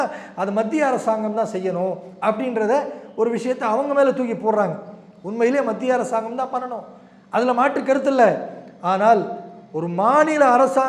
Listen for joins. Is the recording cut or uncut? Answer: uncut